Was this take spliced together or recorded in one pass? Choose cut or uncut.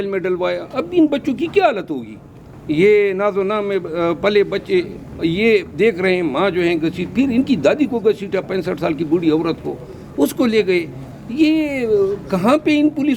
uncut